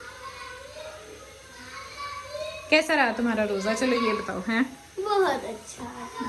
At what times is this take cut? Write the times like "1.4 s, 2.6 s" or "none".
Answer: none